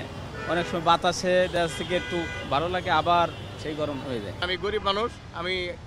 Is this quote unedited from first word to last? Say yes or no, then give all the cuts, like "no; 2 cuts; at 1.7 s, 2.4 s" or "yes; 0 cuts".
yes; 0 cuts